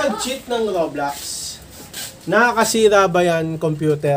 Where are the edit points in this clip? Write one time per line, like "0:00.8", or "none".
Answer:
none